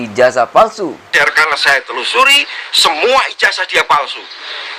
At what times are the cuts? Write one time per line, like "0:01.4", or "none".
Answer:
0:01.1